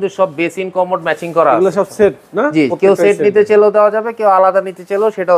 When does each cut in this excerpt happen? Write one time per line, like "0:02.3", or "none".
none